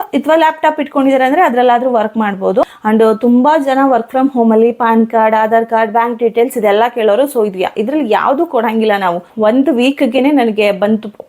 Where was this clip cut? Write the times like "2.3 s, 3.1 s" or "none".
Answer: 2.7 s, 9.3 s